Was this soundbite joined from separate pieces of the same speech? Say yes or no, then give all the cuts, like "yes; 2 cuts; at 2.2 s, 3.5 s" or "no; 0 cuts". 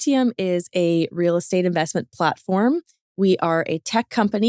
no; 0 cuts